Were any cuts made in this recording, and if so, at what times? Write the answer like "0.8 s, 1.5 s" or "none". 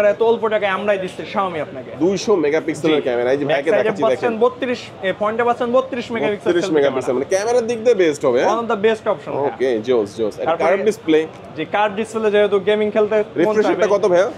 none